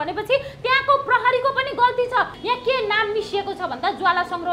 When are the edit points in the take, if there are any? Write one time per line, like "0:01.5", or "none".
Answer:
0:02.4